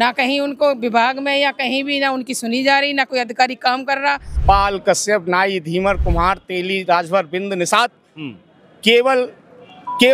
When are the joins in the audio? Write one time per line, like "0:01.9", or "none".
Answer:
0:04.3